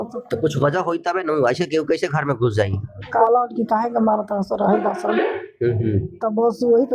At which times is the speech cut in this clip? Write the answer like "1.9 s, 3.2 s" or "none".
3.2 s

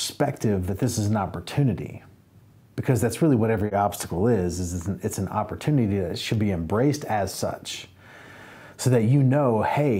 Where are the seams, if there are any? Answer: 3.7 s

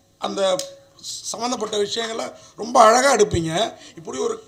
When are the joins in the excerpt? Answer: none

